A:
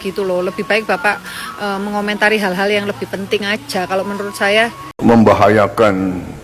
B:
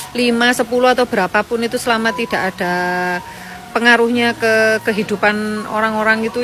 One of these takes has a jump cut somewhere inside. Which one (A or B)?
A